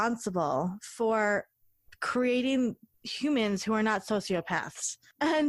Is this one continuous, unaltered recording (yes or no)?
yes